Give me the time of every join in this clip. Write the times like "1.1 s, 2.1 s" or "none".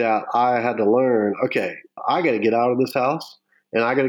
none